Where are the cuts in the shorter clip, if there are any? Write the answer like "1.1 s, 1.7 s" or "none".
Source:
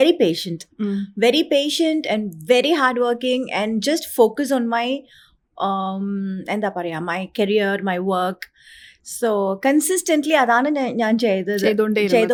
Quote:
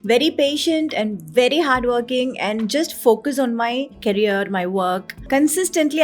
3.9 s, 5.2 s